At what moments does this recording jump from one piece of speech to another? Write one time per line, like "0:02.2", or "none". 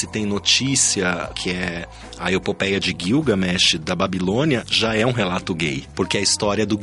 0:01.3
0:05.8